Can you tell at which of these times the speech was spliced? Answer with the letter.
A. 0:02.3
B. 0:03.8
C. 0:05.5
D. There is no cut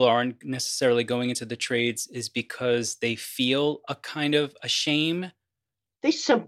C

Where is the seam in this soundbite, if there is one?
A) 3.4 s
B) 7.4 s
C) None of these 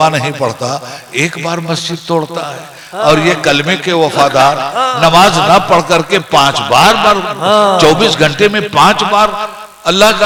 C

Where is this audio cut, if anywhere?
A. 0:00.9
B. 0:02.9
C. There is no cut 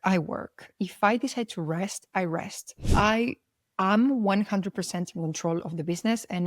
B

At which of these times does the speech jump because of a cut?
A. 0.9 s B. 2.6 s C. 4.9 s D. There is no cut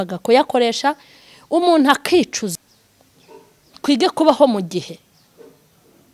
B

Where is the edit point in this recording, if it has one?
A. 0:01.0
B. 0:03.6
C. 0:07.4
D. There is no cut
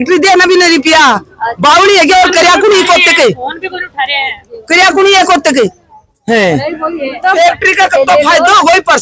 C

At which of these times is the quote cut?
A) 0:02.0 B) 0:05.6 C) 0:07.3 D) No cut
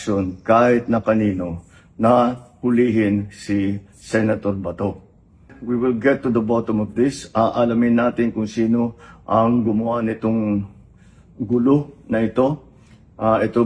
B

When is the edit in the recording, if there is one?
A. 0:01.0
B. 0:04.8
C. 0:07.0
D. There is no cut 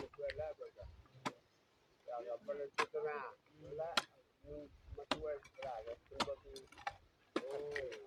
D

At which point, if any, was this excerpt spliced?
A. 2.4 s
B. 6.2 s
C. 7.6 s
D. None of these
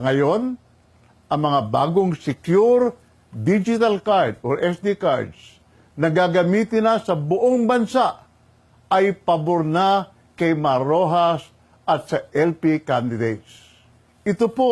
D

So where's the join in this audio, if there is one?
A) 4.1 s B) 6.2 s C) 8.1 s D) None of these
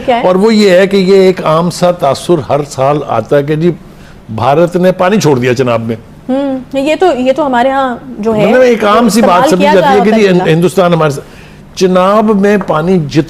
D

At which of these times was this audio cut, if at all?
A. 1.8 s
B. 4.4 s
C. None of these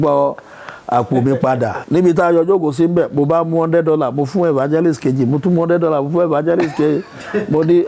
A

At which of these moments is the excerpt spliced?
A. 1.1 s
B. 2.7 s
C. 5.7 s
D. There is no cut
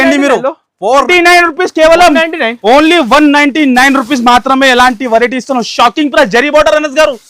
A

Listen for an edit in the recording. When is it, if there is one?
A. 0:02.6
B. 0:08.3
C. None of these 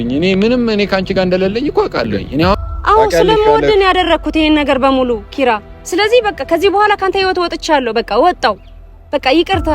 A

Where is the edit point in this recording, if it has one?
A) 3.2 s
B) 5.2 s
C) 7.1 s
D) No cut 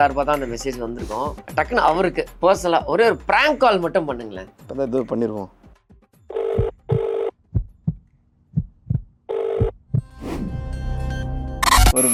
D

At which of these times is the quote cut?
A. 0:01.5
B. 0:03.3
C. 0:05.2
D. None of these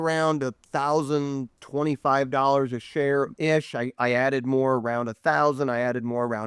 B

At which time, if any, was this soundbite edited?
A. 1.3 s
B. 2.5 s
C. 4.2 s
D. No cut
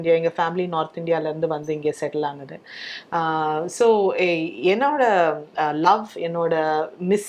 D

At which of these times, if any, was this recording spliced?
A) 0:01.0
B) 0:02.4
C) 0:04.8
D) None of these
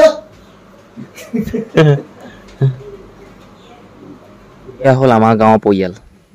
C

